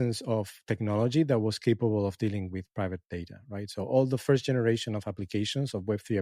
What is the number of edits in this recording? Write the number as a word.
zero